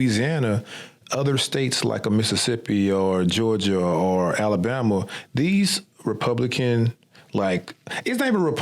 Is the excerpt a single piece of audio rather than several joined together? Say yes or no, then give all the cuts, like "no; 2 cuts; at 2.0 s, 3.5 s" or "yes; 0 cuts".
yes; 0 cuts